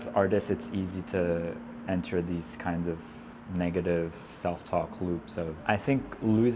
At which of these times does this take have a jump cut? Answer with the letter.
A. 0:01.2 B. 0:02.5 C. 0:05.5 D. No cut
C